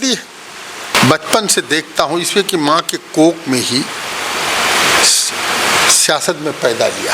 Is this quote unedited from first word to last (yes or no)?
no